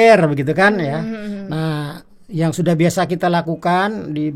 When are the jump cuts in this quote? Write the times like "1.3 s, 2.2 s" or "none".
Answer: none